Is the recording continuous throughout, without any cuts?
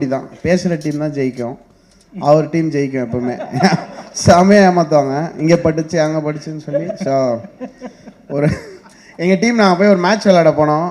yes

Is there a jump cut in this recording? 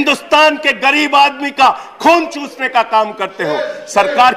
no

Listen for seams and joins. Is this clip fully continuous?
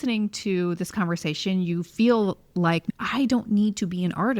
no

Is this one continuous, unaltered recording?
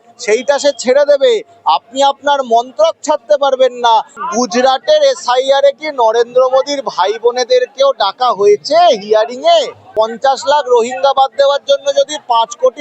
no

